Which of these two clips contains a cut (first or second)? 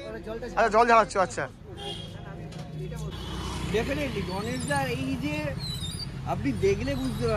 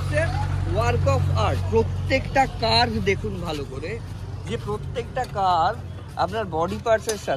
first